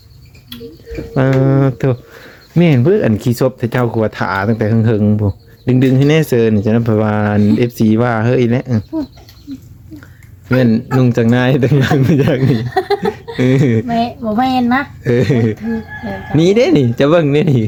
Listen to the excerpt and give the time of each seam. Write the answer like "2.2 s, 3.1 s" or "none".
none